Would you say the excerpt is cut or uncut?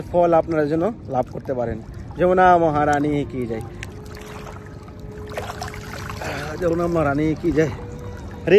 uncut